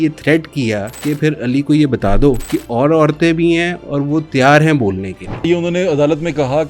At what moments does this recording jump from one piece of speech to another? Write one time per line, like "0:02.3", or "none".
0:00.9
0:02.5
0:05.4